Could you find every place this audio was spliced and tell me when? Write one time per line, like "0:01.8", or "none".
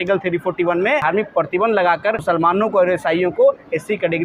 0:01.0
0:02.2